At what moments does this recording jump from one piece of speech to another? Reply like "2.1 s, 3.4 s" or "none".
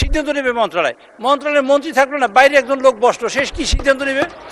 none